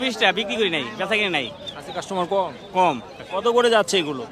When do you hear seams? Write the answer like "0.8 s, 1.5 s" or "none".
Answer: 3.2 s